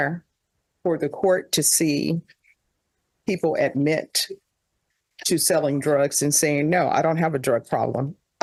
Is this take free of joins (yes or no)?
yes